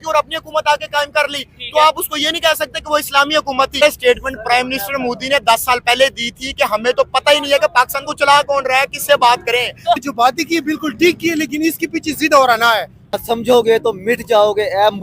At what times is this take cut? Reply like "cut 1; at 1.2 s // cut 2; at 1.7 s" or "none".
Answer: cut 1; at 3.8 s // cut 2; at 10.0 s // cut 3; at 13.2 s